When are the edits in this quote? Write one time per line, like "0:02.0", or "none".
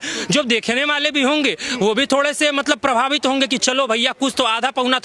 none